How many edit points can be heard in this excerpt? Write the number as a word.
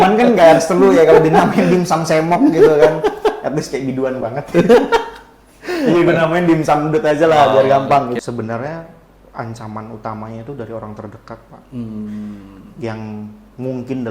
one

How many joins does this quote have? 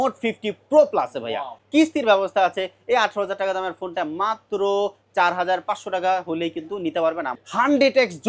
two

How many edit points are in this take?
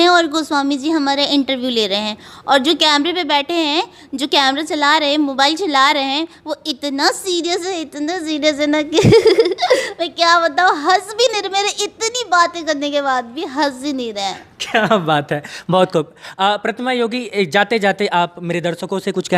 zero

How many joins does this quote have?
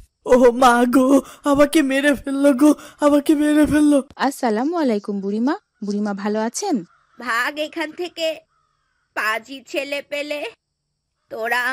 one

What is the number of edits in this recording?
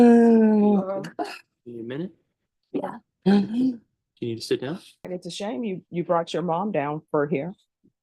one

